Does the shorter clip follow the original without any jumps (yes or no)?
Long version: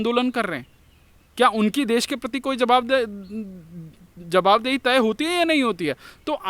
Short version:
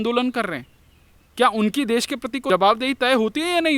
no